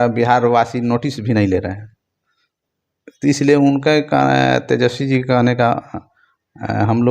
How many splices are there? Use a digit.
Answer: 0